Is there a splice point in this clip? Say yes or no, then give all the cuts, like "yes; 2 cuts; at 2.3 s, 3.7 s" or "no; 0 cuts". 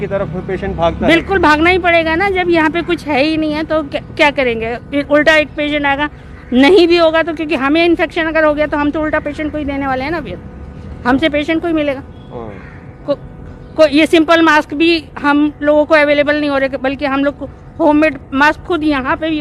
no; 0 cuts